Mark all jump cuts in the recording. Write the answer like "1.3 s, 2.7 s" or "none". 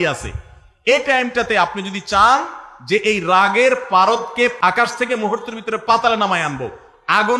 4.5 s

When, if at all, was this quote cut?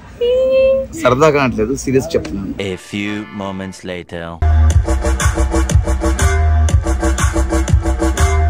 none

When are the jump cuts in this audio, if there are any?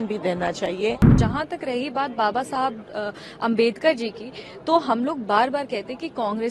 1.1 s

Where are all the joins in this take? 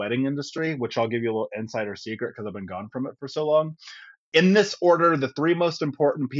none

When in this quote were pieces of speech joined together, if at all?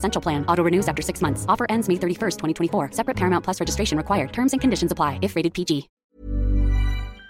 5.9 s

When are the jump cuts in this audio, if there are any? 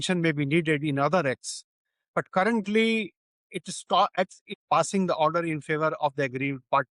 4.1 s

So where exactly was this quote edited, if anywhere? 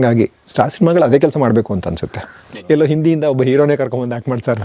2.6 s

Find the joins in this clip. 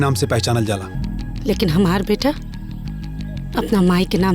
1.0 s

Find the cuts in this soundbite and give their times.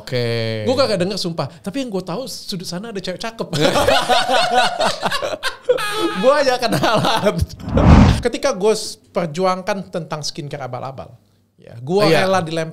8.0 s

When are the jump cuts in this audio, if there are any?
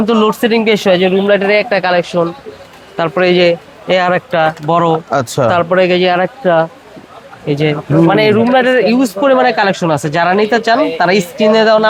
none

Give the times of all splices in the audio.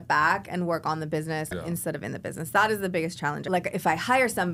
1.5 s, 3.4 s

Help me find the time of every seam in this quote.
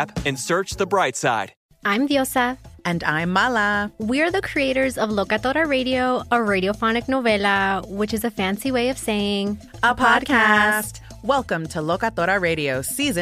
1.6 s

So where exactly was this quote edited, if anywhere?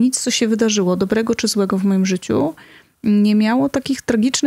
none

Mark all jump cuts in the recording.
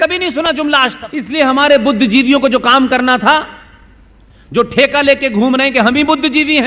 1.3 s

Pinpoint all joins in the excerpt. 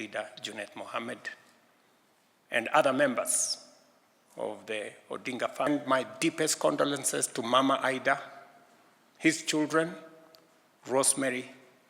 5.7 s

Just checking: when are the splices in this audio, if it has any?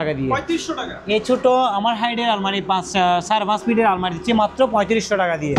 none

